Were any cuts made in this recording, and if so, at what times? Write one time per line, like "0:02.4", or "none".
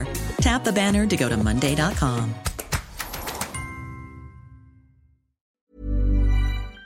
0:05.5